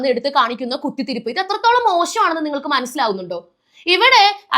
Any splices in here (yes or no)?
no